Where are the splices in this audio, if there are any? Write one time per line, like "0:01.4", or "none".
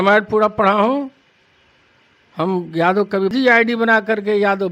0:03.3